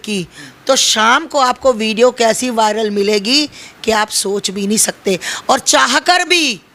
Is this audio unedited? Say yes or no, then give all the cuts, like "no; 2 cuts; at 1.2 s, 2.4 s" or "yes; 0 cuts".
yes; 0 cuts